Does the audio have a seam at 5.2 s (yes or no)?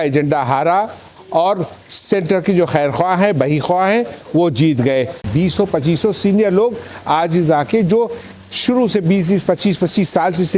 yes